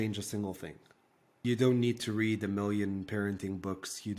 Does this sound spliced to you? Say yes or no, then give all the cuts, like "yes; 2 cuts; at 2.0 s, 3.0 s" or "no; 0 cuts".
yes; 1 cut; at 1.4 s